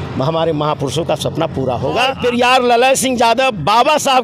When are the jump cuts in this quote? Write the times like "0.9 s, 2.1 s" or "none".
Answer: 2.2 s

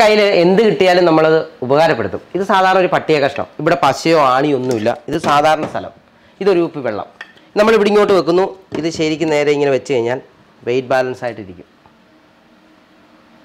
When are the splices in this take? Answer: none

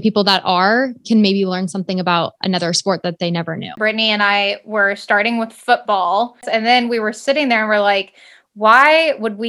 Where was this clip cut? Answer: 3.8 s, 6.5 s

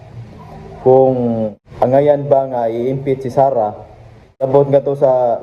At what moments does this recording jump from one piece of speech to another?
1.6 s, 4.4 s

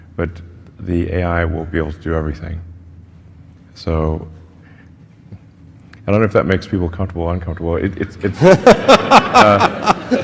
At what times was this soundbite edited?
none

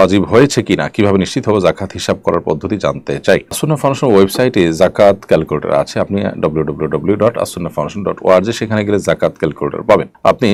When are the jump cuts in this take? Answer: none

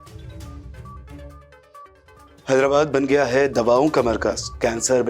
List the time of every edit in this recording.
1.0 s

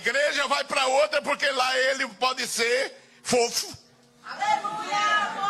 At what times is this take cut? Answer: none

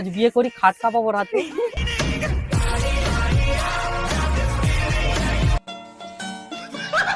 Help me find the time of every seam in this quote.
none

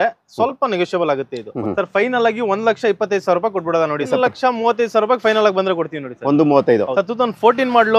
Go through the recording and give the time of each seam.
1.6 s, 4.1 s, 6.9 s

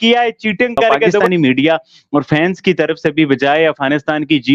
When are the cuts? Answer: 1.2 s

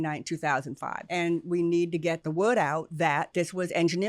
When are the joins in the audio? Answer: 0.9 s, 2.2 s, 3.3 s

